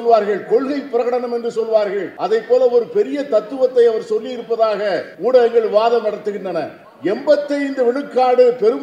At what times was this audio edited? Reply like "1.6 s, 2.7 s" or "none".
2.1 s, 5.1 s, 6.8 s